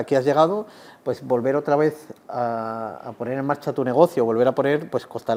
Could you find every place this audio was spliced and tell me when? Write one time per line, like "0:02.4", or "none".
none

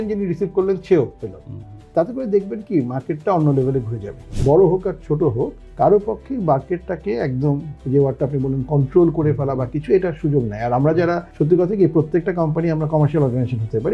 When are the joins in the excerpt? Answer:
0:04.3
0:07.7

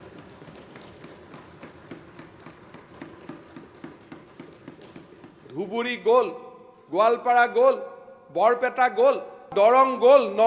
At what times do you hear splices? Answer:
0:09.5

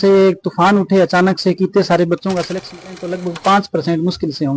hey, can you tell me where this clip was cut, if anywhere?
0:02.9

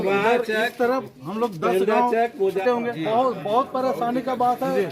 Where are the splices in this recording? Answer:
0:02.6

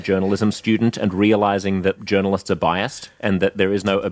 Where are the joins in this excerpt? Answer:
0:02.0

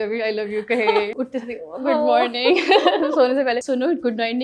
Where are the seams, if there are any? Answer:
0:01.1
0:03.6

